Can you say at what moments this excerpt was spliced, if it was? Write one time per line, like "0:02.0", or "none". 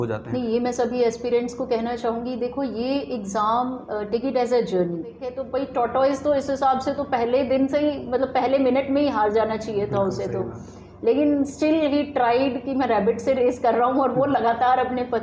0:05.4